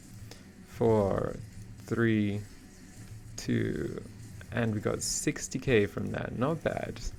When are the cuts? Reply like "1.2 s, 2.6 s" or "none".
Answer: none